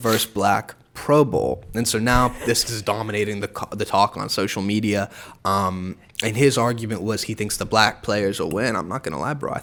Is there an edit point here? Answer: no; 0 cuts

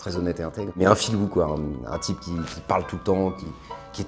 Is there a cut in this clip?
no; 0 cuts

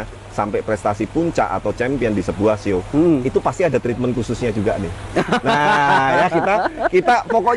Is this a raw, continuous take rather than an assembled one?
yes; 0 cuts

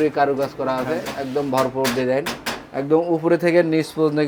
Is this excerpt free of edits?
yes; 0 cuts

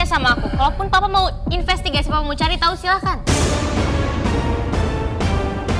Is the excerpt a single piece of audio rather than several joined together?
yes; 0 cuts

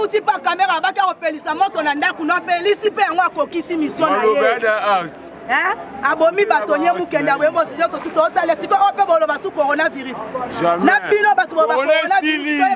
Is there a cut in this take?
no; 0 cuts

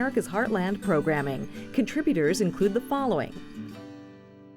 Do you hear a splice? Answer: yes; 1 cut; at 3.3 s

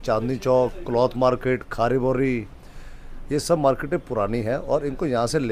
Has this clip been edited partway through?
no; 0 cuts

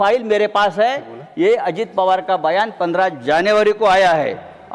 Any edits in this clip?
no; 0 cuts

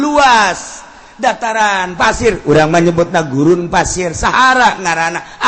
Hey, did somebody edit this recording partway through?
no; 0 cuts

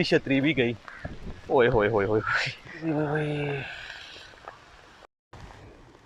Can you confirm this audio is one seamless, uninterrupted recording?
no; 2 cuts; at 2.8 s, 5.2 s

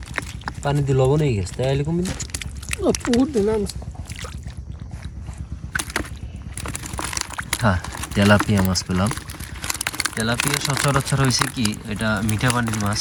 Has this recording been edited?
no; 0 cuts

